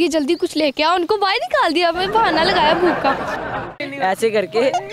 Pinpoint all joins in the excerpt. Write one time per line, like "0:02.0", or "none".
0:03.6